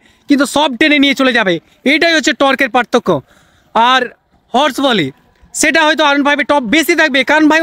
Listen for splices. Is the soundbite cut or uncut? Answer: uncut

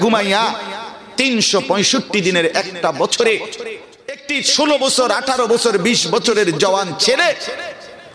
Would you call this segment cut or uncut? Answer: cut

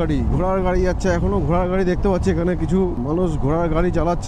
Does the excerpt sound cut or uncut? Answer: cut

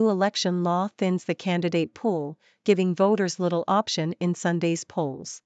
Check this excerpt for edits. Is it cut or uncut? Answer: uncut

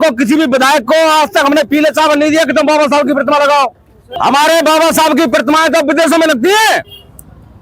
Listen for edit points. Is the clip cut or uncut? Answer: cut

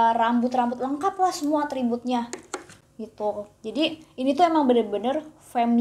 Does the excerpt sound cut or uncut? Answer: uncut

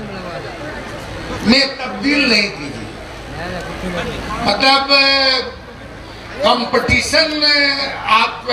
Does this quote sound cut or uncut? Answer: uncut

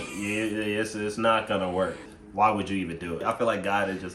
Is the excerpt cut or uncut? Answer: cut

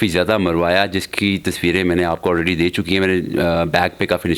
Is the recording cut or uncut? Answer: uncut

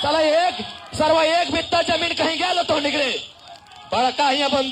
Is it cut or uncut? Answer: uncut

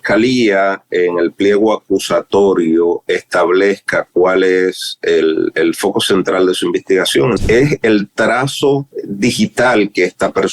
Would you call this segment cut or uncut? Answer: cut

